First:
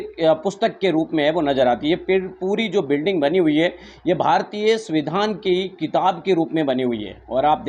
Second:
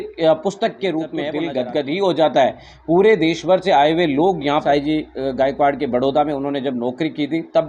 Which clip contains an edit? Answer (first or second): second